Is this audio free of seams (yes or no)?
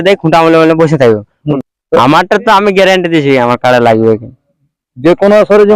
no